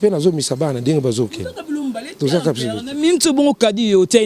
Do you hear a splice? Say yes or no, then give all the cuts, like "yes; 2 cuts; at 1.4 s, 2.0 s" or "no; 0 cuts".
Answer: no; 0 cuts